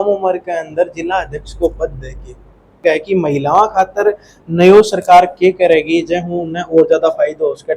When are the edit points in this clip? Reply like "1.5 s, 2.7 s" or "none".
2.8 s